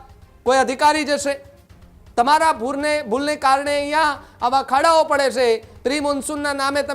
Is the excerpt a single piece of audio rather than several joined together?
yes; 0 cuts

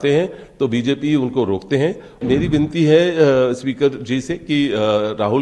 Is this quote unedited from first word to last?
no; 1 cut; at 2.2 s

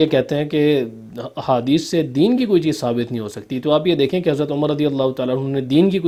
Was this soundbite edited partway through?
no; 0 cuts

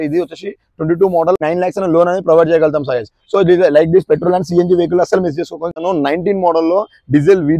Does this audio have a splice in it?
yes; 2 cuts; at 1.4 s, 5.7 s

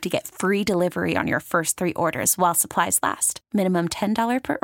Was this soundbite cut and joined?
no; 0 cuts

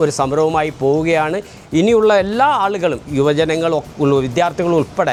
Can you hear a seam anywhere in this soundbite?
no; 0 cuts

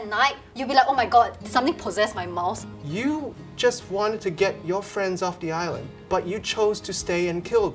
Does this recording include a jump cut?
yes; 2 cuts; at 2.6 s, 5.9 s

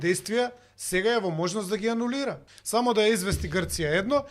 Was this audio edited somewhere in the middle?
yes; 1 cut; at 2.5 s

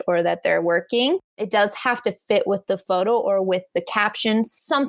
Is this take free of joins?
no; 1 cut; at 1.4 s

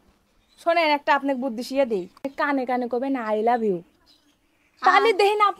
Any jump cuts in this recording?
yes; 1 cut; at 2.2 s

